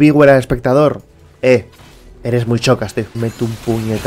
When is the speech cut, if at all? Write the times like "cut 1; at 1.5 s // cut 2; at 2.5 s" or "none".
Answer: cut 1; at 3.1 s

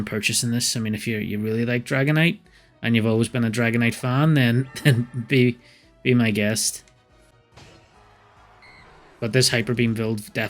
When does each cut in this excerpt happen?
cut 1; at 9.2 s

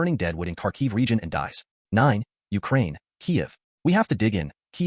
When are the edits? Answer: cut 1; at 1.7 s

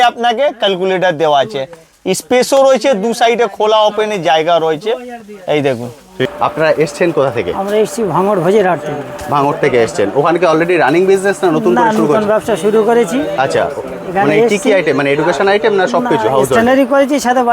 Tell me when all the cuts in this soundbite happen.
cut 1; at 6.3 s

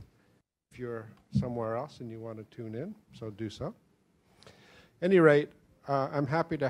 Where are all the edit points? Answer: cut 1; at 5.0 s

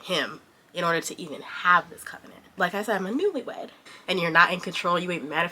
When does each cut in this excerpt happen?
cut 1; at 2.6 s // cut 2; at 3.9 s

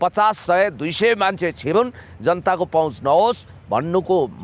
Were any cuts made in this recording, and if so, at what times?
none

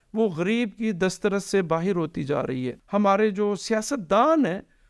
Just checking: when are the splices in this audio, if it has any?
cut 1; at 2.8 s

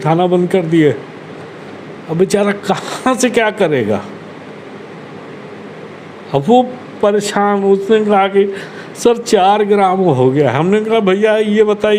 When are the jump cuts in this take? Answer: none

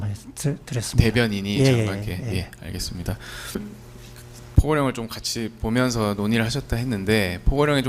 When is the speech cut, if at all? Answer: cut 1; at 3.6 s

